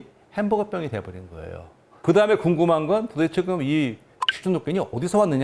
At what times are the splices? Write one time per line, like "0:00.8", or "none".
0:02.0